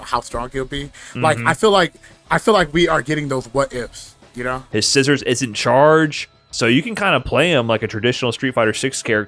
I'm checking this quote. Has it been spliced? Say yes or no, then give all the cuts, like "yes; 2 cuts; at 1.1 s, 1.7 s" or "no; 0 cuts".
yes; 1 cut; at 4.5 s